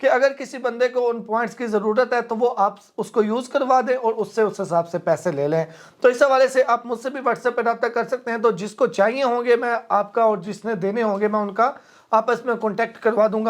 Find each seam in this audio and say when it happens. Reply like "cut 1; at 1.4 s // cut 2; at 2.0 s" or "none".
none